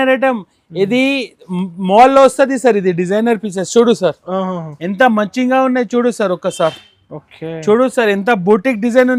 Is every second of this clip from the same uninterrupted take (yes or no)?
yes